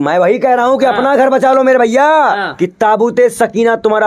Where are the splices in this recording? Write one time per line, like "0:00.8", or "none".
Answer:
0:02.2